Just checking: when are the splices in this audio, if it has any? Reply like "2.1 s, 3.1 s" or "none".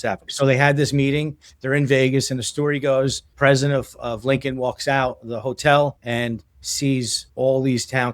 3.2 s, 6.0 s, 7.2 s